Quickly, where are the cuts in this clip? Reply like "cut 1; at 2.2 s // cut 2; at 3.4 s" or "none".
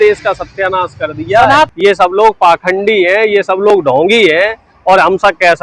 cut 1; at 1.7 s